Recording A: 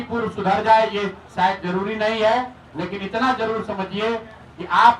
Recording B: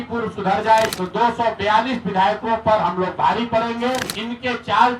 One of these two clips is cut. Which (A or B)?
B